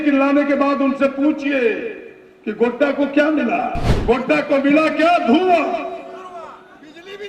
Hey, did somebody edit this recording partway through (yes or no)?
yes